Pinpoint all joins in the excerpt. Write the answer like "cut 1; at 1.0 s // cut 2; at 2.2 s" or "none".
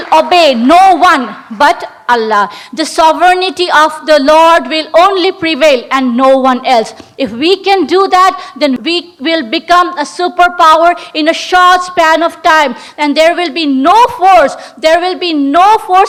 none